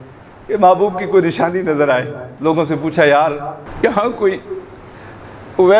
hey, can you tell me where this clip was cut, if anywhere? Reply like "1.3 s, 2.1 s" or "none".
2.2 s, 3.6 s

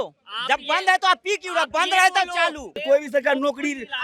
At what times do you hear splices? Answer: 2.8 s

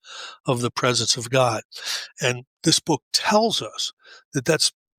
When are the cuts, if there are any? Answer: 2.5 s

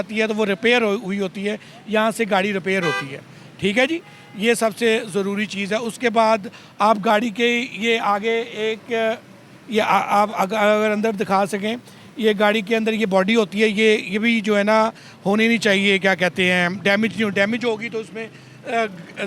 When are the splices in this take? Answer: none

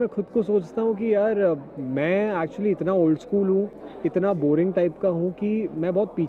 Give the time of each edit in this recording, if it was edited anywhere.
none

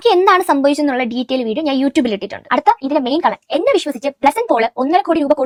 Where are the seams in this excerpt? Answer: none

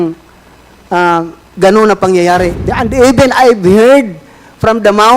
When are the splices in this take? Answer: 2.7 s

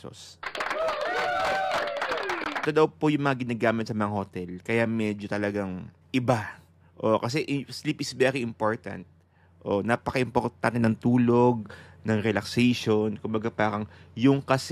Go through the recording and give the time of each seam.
2.6 s, 5.9 s

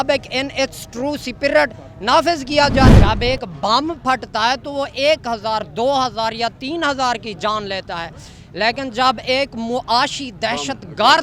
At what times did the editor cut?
2.9 s

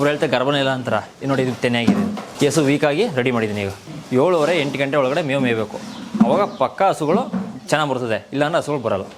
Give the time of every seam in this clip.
2.3 s, 3.8 s

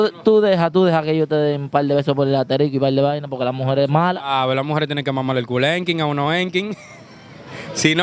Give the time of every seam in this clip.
none

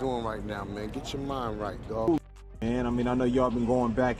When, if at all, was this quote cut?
2.0 s

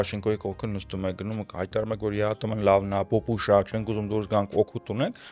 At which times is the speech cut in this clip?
none

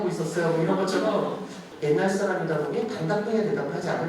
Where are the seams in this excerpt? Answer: 1.7 s

